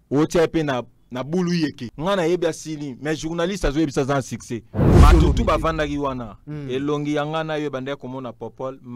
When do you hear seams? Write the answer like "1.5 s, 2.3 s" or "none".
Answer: 1.9 s, 4.9 s